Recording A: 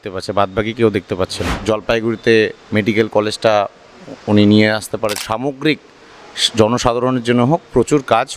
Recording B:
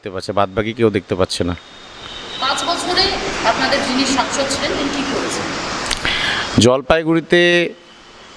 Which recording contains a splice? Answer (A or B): A